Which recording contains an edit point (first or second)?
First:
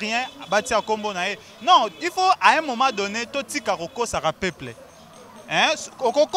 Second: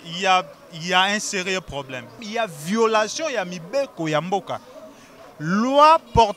second